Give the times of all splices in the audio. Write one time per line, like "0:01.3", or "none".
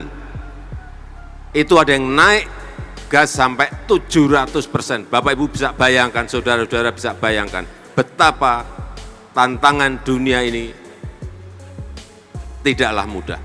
0:10.9
0:12.6